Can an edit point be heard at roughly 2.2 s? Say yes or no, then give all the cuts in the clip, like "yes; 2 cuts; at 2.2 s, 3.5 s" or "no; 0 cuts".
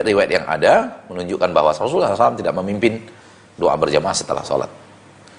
no; 0 cuts